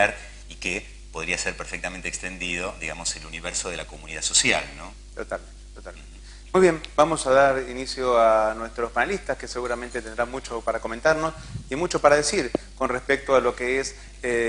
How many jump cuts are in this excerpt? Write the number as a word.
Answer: one